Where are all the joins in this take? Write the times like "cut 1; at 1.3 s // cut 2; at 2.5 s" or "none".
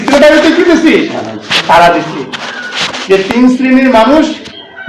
none